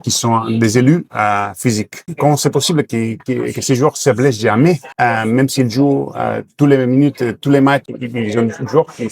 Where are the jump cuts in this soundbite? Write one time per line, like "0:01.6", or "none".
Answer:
0:02.0
0:04.9
0:07.9